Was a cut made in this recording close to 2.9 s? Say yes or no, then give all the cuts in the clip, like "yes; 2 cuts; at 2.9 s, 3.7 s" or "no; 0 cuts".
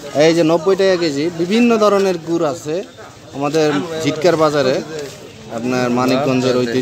no; 0 cuts